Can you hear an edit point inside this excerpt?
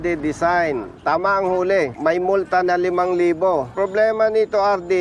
yes; 2 cuts; at 1.9 s, 3.7 s

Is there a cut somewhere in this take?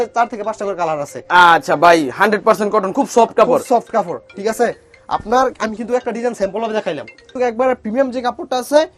no; 0 cuts

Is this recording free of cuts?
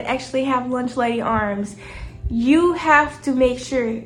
yes; 0 cuts

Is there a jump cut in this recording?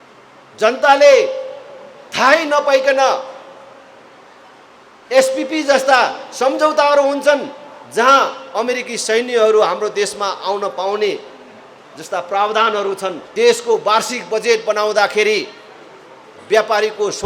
yes; 1 cut; at 13.2 s

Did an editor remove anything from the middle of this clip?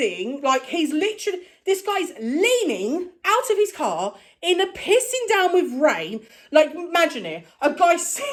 no; 0 cuts

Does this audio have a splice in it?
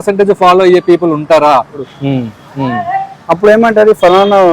yes; 1 cut; at 1.9 s

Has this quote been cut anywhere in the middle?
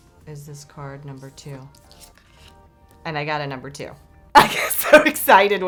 no; 0 cuts

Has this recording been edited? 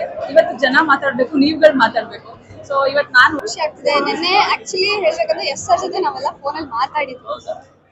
yes; 1 cut; at 3.4 s

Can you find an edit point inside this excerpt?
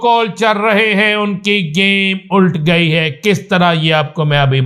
no; 0 cuts

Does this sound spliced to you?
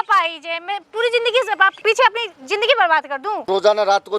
yes; 2 cuts; at 1.7 s, 3.5 s

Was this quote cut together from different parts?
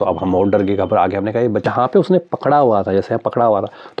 yes; 1 cut; at 1.6 s

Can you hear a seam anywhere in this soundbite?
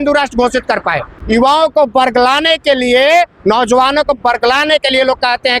yes; 1 cut; at 1.1 s

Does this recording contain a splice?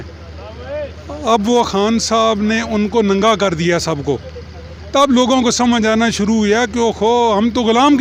no; 0 cuts

